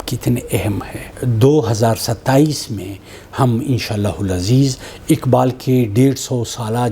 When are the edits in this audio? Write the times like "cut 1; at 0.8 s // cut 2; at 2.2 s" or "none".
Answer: cut 1; at 1.1 s